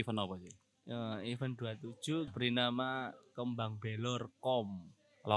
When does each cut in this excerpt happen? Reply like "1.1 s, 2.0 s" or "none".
2.3 s